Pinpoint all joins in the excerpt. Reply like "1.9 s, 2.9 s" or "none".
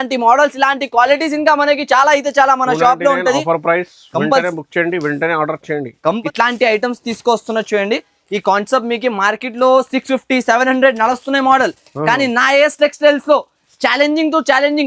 6.1 s

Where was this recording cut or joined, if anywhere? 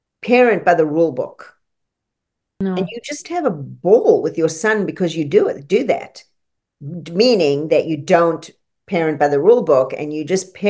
2.6 s

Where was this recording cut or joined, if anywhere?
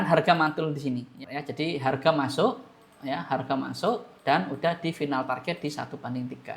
1.2 s

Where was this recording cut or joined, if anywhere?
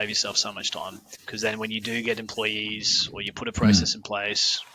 1.1 s

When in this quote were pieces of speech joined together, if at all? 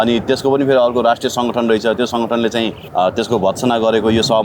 2.8 s

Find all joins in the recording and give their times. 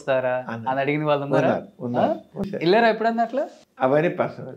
2.5 s, 3.6 s

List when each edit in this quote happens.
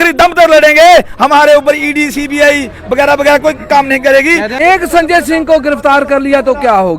4.5 s

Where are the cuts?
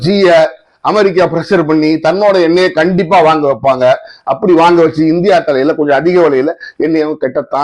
none

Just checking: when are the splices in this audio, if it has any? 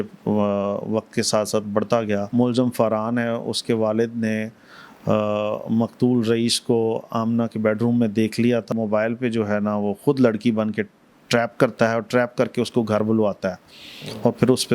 2.3 s, 8.7 s

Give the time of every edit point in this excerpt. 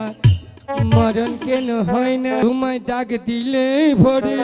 2.4 s

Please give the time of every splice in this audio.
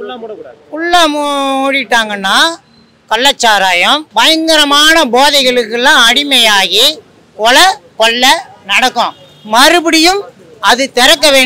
none

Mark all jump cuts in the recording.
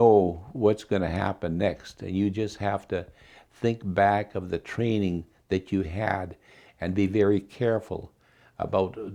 none

